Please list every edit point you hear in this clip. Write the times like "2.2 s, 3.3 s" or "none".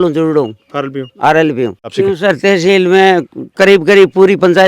1.9 s